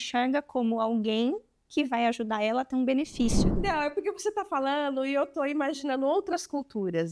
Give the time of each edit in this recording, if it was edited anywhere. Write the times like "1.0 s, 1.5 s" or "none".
3.5 s